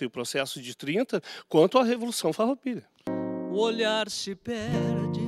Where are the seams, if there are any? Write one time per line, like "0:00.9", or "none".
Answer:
0:03.1